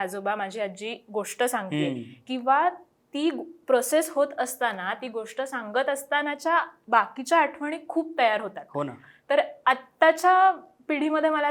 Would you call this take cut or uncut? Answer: uncut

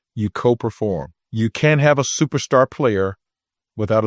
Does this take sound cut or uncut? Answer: cut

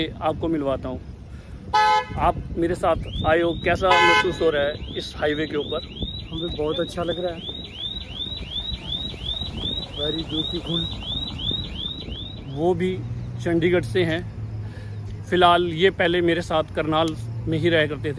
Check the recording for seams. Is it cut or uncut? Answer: cut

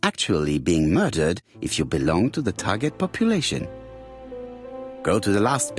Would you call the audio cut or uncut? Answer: cut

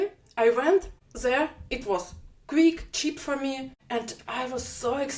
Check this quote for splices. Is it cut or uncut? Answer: cut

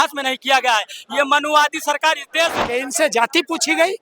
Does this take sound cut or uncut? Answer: cut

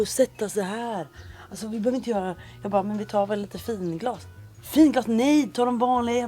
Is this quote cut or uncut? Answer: uncut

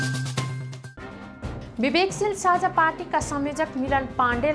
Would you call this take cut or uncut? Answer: cut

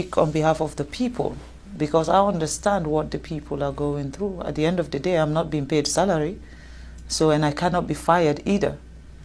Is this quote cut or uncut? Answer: uncut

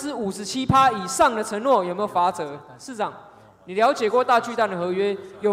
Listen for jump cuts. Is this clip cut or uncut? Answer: uncut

